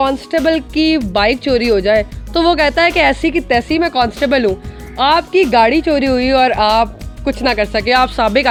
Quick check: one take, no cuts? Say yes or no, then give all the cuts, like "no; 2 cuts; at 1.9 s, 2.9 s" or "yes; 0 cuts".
yes; 0 cuts